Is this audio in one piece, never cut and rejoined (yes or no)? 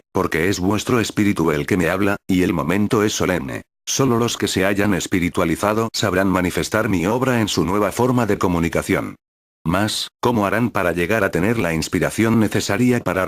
no